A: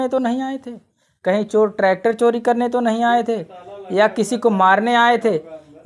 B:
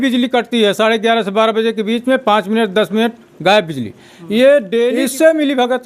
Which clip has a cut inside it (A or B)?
B